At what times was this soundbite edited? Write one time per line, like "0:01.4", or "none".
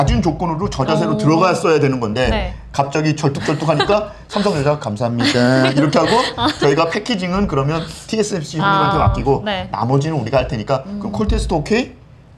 none